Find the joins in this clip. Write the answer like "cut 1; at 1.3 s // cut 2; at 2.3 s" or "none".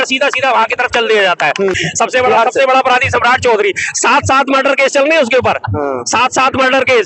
cut 1; at 1.8 s